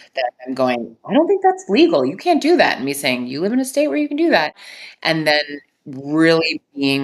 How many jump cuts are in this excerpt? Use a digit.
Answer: 1